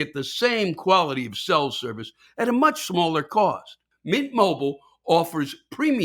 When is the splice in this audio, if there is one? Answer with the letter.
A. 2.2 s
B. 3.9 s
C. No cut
B